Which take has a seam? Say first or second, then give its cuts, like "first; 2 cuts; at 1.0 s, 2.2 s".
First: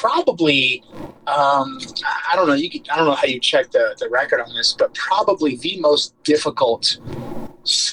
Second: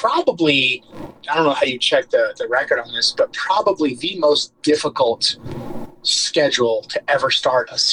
second; 1 cut; at 1.1 s